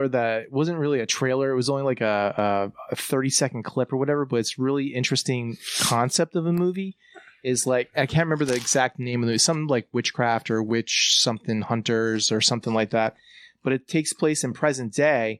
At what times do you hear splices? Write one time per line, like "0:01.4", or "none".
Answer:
none